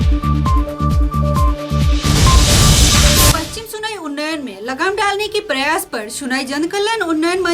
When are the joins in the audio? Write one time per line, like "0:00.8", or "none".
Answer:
none